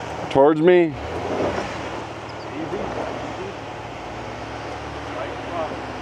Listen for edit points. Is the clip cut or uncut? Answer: uncut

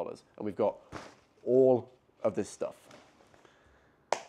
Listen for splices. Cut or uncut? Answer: uncut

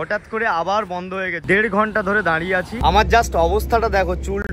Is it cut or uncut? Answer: cut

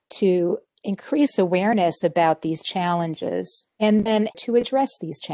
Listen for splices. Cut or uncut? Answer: cut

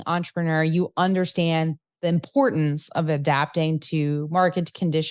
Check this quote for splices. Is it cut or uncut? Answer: uncut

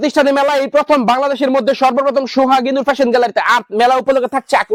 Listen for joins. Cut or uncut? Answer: uncut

